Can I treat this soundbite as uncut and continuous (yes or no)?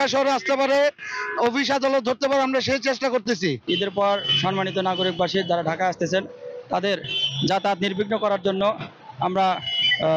no